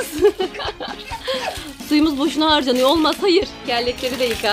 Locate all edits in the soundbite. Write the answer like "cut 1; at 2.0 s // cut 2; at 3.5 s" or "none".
cut 1; at 3.6 s